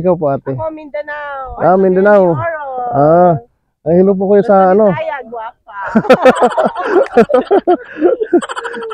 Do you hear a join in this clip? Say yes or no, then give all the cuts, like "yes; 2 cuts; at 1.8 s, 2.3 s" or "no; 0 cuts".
no; 0 cuts